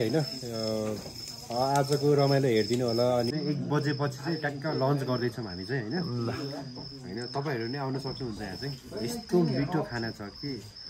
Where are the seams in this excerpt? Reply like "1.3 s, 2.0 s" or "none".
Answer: 3.3 s

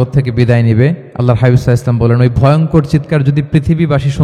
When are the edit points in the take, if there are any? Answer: 1.1 s

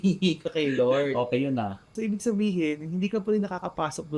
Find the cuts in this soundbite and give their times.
1.9 s

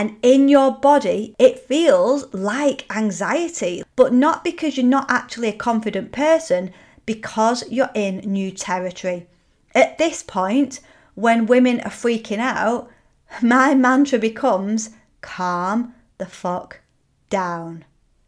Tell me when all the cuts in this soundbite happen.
1.3 s, 3.8 s

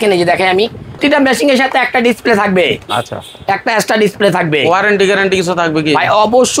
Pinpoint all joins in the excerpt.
1.0 s

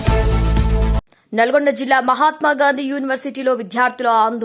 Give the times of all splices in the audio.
1.1 s

